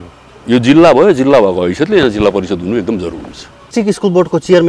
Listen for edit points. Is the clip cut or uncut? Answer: cut